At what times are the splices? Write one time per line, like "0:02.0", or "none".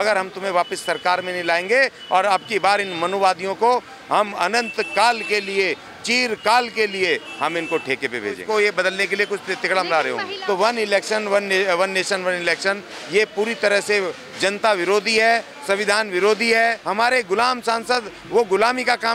0:08.4
0:10.3
0:16.8